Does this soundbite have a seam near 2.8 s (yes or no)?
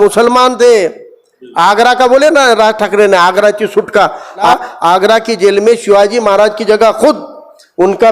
no